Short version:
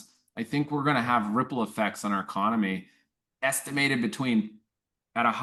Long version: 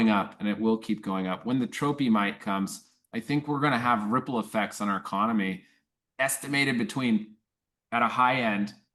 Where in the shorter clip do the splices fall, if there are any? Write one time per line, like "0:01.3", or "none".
none